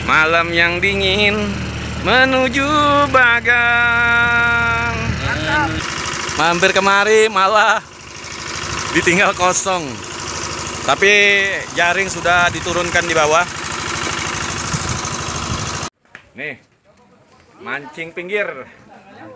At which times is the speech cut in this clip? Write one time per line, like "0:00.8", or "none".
0:05.8
0:15.9